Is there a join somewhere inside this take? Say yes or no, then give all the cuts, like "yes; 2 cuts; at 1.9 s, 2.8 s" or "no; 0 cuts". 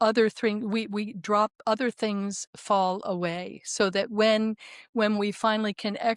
no; 0 cuts